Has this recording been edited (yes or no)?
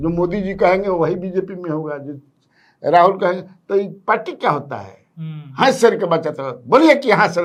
no